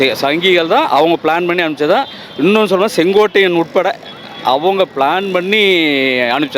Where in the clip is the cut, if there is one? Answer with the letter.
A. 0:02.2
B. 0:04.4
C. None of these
C